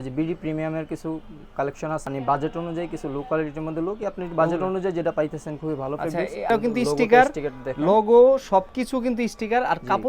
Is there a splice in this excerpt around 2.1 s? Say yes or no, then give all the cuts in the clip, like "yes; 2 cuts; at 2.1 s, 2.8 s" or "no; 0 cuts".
yes; 2 cuts; at 2.1 s, 6.5 s